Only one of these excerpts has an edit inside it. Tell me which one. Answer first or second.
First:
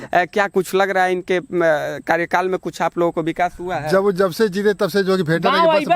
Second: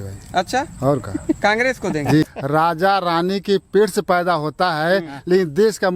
second